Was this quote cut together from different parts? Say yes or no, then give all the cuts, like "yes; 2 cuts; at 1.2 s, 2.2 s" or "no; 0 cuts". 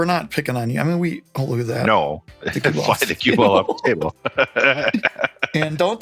yes; 1 cut; at 2.3 s